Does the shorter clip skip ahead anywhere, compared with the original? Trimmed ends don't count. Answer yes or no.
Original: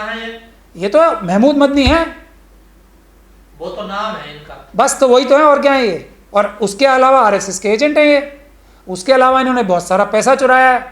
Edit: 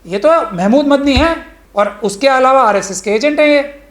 yes